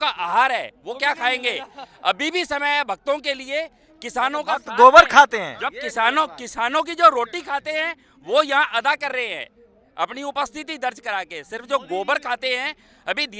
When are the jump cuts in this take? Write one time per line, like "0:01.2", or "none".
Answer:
none

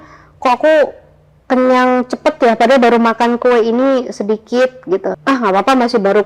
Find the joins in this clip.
0:05.2

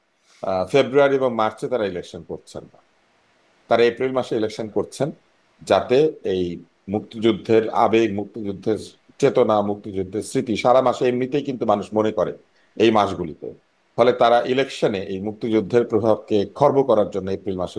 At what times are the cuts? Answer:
none

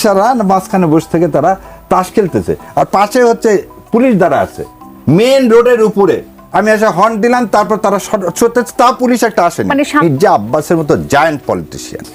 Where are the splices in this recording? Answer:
0:10.0

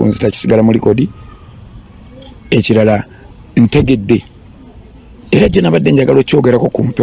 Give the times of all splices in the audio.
none

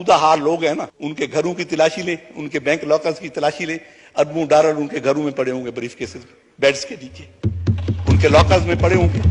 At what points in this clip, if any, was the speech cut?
0:01.0

